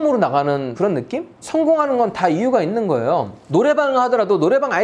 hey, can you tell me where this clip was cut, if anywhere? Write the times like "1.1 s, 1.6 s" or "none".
none